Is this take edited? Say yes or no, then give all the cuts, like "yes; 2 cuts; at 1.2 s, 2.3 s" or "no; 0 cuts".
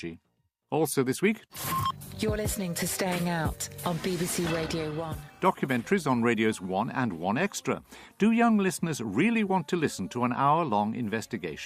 yes; 1 cut; at 9.3 s